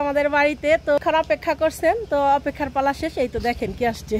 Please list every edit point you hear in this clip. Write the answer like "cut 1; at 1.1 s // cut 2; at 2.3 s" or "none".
cut 1; at 1.0 s